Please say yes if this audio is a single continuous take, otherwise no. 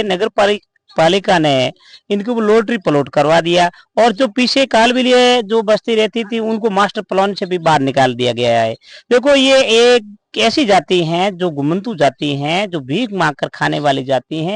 yes